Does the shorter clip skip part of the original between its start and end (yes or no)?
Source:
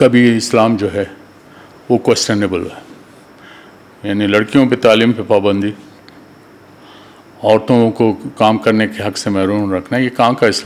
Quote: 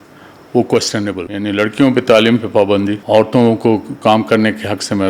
yes